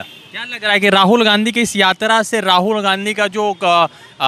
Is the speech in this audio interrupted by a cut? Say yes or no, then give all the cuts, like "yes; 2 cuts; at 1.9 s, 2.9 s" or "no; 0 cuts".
no; 0 cuts